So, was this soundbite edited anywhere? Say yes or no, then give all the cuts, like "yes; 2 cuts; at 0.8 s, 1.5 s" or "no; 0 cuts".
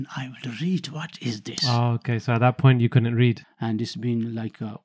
yes; 1 cut; at 3.4 s